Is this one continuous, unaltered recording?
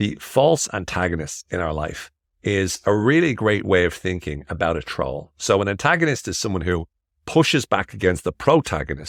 yes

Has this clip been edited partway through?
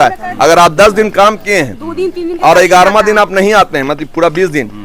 no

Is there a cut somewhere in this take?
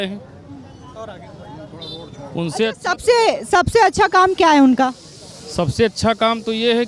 no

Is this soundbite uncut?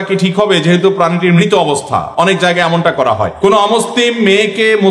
no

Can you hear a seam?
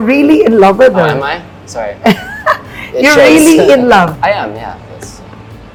no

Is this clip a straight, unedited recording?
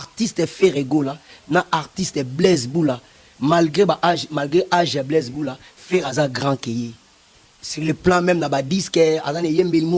yes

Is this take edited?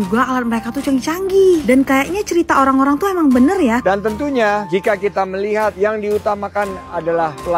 yes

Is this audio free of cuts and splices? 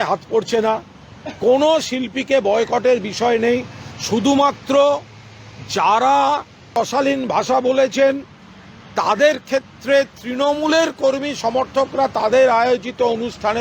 no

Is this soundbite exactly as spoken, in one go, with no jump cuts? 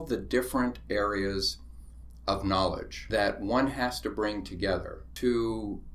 no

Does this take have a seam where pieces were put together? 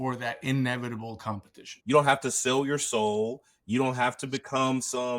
yes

